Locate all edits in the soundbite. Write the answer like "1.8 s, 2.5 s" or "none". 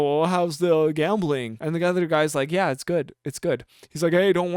1.5 s